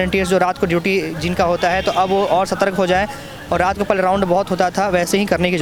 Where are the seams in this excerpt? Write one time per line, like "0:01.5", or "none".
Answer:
none